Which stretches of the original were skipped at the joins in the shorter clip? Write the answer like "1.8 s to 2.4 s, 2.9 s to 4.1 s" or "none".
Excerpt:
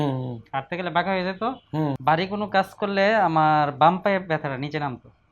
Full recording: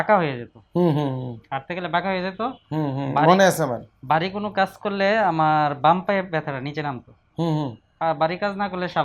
2.9 s to 4.0 s